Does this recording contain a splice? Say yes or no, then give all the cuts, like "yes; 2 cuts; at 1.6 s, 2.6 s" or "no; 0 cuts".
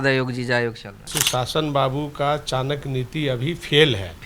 yes; 1 cut; at 1.1 s